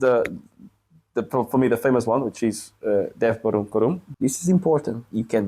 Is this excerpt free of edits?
no; 1 cut; at 4.1 s

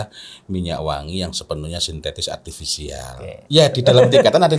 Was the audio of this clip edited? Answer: yes; 1 cut; at 3.4 s

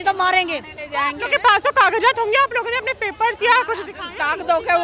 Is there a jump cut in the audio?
no; 0 cuts

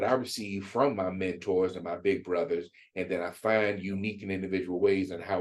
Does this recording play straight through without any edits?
yes; 0 cuts

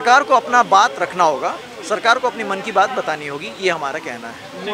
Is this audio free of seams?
yes; 0 cuts

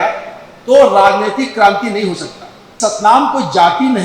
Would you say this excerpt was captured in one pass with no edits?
no; 1 cut; at 2.6 s

